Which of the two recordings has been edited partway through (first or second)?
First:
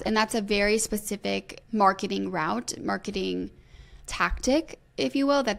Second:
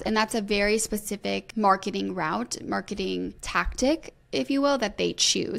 second